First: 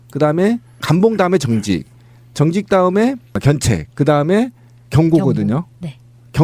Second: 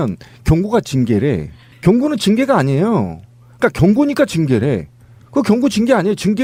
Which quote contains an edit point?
first; 1 cut; at 3.8 s

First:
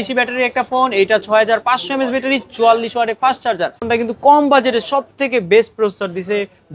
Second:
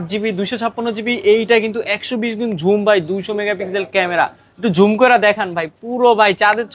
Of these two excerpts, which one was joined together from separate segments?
first; 1 cut; at 3.8 s

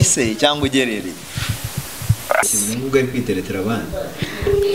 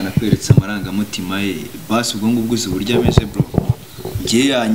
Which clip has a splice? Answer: first; 1 cut; at 2.5 s

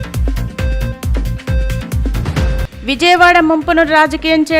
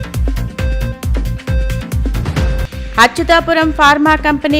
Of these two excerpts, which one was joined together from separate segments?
first; 1 cut; at 2.6 s

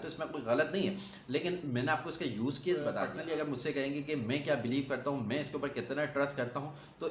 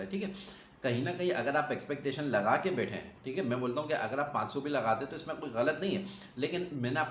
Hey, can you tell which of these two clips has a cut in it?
first; 1 cut; at 3.1 s

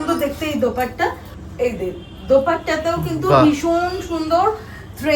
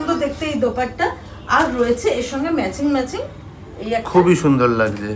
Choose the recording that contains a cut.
first; 1 cut; at 1.3 s

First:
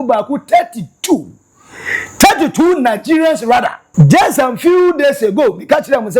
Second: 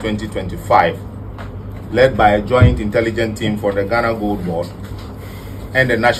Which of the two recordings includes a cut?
first; 1 cut; at 3.8 s

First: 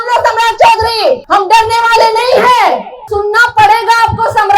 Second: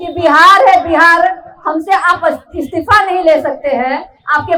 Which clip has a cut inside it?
first; 2 cuts; at 1.2 s, 3.0 s

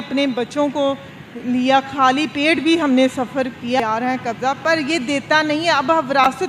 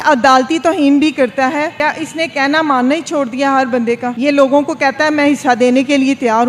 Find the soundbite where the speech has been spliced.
first; 1 cut; at 3.8 s

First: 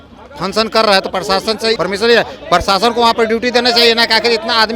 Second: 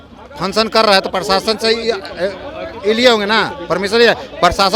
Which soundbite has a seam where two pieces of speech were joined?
first; 1 cut; at 1.8 s

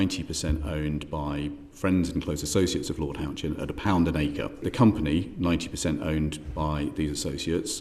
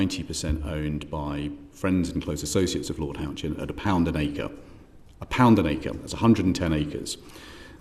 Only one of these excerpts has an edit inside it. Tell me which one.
first; 1 cut; at 4.7 s

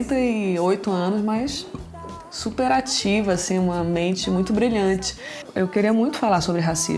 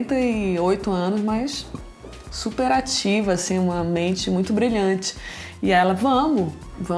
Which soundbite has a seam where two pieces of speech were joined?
first; 1 cut; at 5.4 s

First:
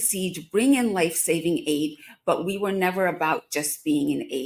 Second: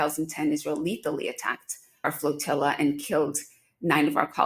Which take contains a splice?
second; 1 cut; at 2.0 s

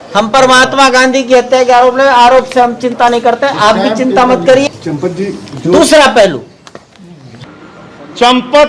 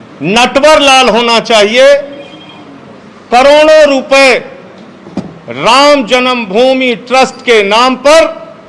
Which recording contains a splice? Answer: first; 2 cuts; at 4.7 s, 7.4 s

